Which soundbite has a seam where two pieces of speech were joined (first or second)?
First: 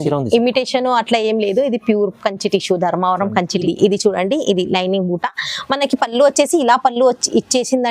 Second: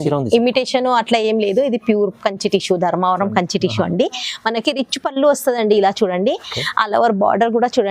first